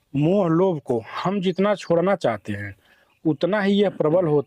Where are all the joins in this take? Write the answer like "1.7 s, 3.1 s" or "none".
none